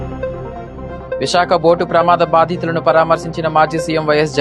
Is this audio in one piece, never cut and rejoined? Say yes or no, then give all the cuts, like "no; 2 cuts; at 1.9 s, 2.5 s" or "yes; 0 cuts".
no; 1 cut; at 1.2 s